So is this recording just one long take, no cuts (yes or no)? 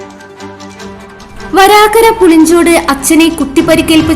no